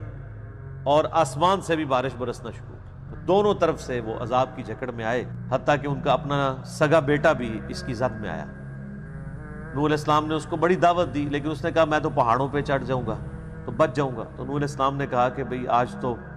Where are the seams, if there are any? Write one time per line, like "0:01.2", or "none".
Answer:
0:05.4